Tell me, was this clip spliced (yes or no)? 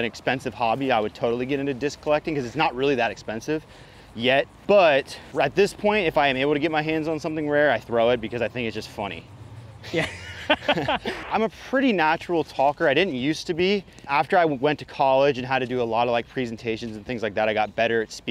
yes